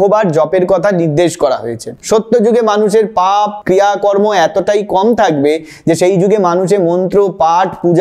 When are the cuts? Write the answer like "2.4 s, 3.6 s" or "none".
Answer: 2.0 s